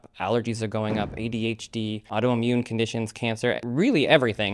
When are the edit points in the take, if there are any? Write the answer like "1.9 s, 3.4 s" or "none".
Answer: 2.0 s, 3.6 s